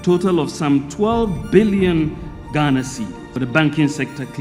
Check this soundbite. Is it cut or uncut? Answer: uncut